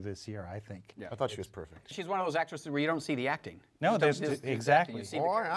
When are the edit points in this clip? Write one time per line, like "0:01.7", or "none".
0:01.9